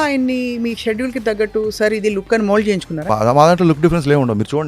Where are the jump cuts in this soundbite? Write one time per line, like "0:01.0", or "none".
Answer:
0:03.0